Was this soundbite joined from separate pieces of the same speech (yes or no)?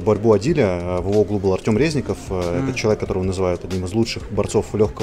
no